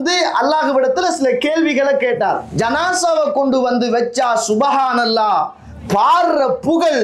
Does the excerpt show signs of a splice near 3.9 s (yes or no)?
no